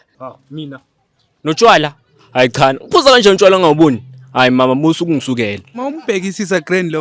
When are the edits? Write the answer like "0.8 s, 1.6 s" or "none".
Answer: 5.7 s